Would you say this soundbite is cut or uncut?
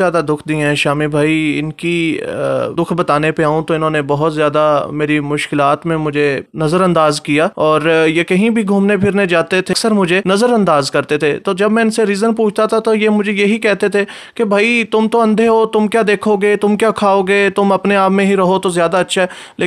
cut